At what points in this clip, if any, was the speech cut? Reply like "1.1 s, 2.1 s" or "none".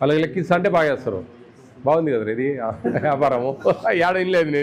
none